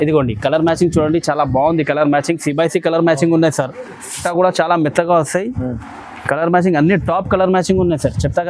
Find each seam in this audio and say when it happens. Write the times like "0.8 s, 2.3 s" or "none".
4.2 s